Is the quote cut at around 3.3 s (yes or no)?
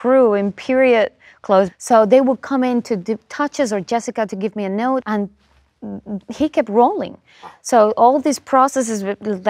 no